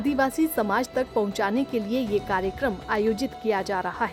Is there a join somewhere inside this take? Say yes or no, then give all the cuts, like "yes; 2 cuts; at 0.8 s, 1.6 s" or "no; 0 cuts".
no; 0 cuts